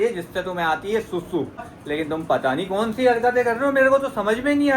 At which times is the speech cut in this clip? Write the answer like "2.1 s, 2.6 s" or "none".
1.7 s